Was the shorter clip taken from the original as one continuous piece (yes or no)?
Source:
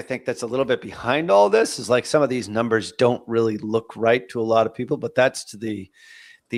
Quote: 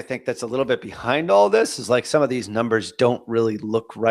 yes